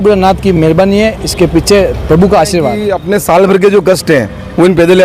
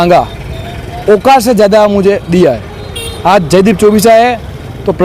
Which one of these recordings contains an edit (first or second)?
first